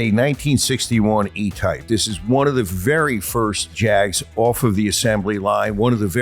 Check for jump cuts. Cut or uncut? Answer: cut